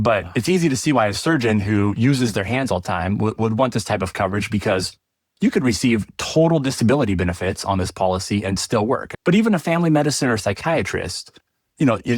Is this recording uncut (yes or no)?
no